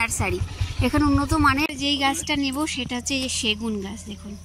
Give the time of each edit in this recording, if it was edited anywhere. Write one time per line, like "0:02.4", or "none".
0:01.7